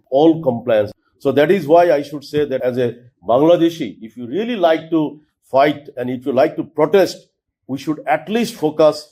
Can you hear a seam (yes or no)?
yes